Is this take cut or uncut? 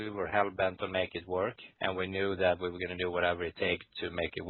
uncut